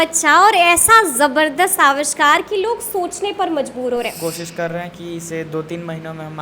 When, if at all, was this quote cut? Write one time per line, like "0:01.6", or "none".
0:04.1